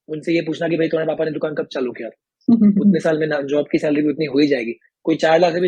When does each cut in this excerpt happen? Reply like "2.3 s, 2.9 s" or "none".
none